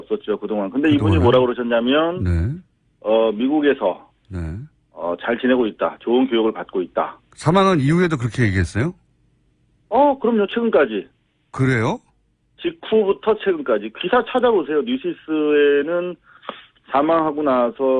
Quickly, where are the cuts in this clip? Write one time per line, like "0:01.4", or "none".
none